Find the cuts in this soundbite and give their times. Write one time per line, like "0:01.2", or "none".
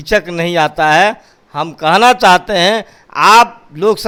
none

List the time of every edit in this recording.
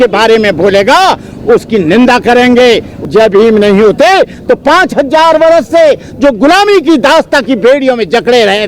0:02.9

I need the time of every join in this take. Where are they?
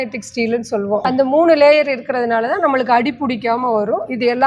0:01.0

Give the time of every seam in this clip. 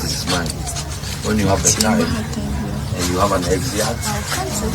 none

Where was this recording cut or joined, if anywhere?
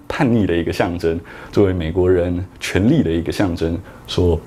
none

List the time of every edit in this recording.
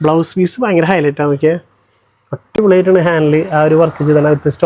none

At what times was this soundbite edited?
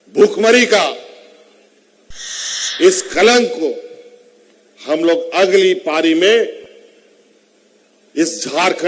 0:02.1

